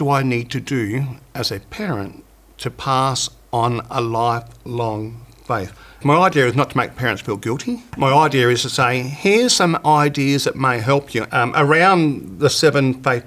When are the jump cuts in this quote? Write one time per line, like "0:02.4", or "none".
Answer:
0:06.0
0:07.9
0:11.2